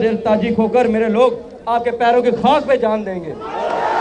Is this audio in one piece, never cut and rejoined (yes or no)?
yes